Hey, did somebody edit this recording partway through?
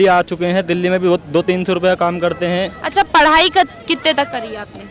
no; 0 cuts

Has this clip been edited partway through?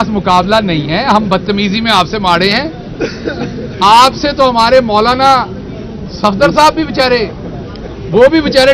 no; 0 cuts

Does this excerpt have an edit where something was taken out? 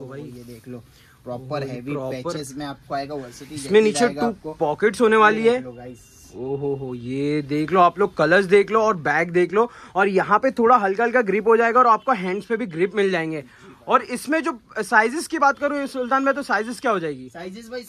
no; 0 cuts

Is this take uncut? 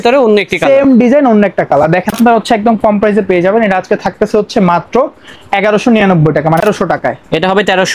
no; 2 cuts; at 2.1 s, 6.6 s

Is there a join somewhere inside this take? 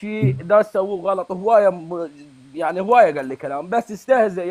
no; 0 cuts

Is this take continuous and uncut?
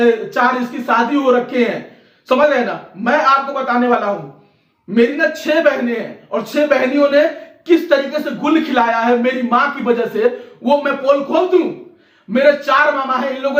yes; 0 cuts

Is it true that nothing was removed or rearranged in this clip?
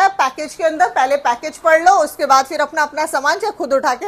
yes; 0 cuts

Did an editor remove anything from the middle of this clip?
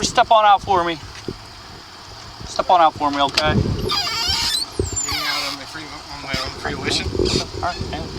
no; 0 cuts

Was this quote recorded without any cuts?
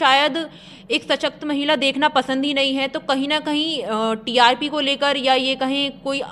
yes; 0 cuts

